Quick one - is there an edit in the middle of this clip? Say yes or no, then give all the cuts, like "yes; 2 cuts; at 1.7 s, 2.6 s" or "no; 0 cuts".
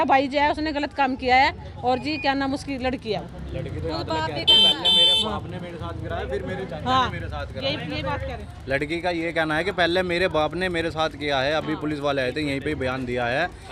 no; 0 cuts